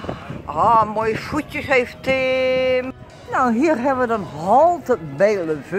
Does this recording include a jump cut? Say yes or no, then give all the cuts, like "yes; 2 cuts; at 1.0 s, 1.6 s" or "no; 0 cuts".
yes; 1 cut; at 2.9 s